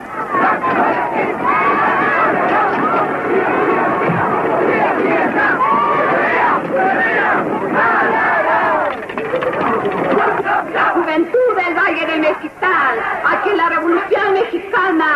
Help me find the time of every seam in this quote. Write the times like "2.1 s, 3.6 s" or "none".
none